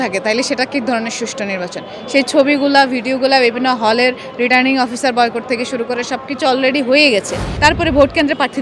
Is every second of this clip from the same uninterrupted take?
no; 1 cut; at 7.4 s

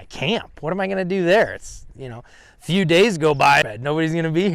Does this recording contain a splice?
yes; 1 cut; at 3.6 s

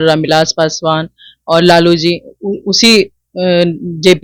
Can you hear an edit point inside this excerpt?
no; 0 cuts

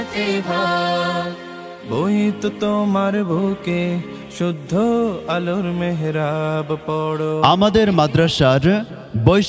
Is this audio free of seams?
no; 1 cut; at 7.4 s

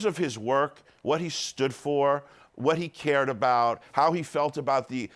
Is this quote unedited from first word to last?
no; 1 cut; at 2.4 s

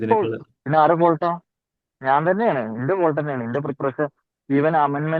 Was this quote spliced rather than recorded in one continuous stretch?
no; 0 cuts

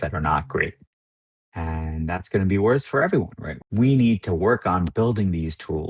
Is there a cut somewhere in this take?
yes; 1 cut; at 3.4 s

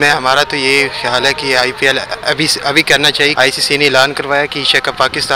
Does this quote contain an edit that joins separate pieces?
yes; 1 cut; at 3.3 s

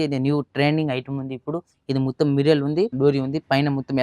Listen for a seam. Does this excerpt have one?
yes; 1 cut; at 2.9 s

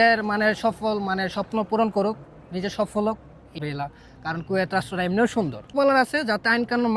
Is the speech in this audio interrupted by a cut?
yes; 2 cuts; at 3.6 s, 5.7 s

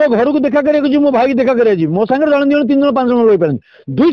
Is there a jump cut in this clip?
no; 0 cuts

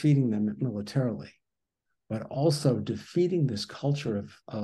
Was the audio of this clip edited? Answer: no; 0 cuts

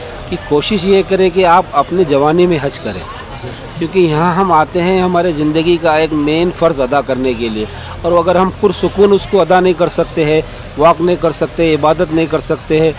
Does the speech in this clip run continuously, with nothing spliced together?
yes; 0 cuts

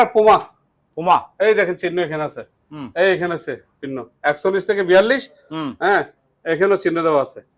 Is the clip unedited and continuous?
yes; 0 cuts

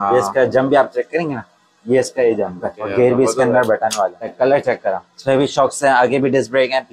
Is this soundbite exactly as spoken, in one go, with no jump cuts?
no; 3 cuts; at 2.9 s, 4.3 s, 5.1 s

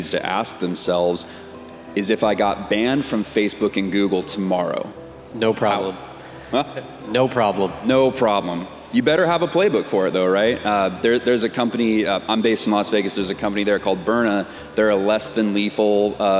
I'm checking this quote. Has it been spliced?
no; 0 cuts

